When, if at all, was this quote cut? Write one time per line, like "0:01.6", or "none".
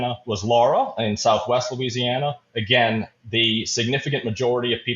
none